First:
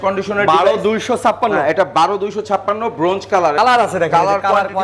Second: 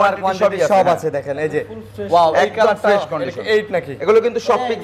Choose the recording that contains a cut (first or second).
first